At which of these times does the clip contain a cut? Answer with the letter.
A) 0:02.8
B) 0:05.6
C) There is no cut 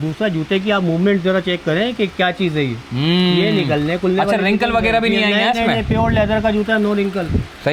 C